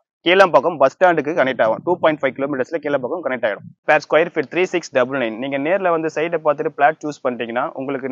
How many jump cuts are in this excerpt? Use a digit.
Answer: 1